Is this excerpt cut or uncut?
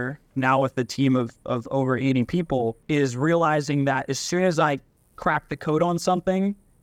uncut